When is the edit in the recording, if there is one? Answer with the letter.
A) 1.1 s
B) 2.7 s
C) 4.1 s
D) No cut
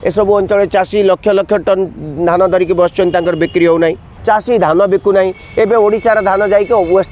C